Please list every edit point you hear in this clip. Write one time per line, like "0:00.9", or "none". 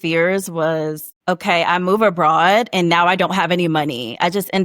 0:01.1